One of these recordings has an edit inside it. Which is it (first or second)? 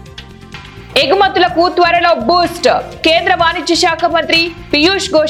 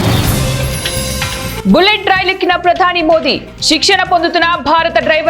second